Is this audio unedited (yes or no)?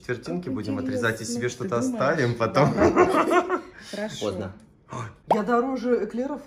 no